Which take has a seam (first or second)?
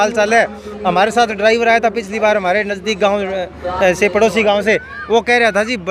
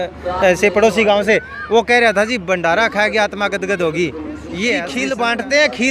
second